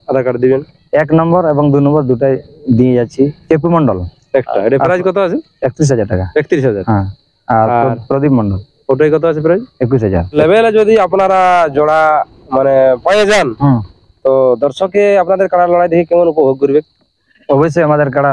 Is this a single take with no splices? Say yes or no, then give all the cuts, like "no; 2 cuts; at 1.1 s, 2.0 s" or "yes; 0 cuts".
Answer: no; 2 cuts; at 3.4 s, 10.3 s